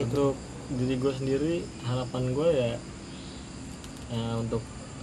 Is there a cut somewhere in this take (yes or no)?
no